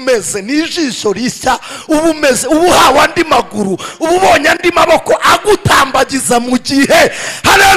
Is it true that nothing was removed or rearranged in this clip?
yes; 0 cuts

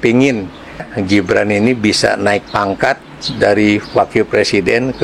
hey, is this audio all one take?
no; 1 cut; at 0.9 s

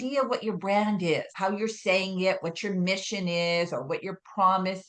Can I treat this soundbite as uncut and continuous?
no; 1 cut; at 1.3 s

